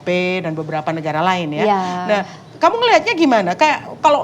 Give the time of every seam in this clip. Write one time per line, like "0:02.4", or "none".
none